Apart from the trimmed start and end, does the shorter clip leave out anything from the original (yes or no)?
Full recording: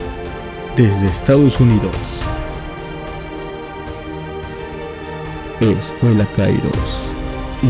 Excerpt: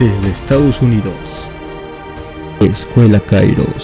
yes